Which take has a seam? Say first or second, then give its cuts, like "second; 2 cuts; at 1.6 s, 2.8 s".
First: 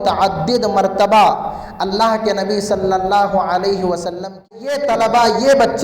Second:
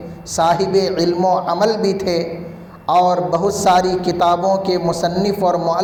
first; 1 cut; at 4.6 s